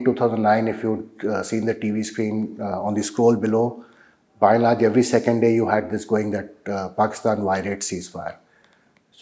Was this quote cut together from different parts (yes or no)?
no